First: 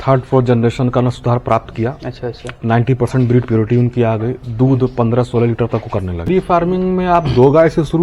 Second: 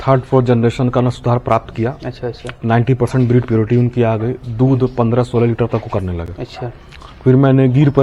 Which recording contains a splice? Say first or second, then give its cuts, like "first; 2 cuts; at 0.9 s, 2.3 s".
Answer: first; 1 cut; at 6.3 s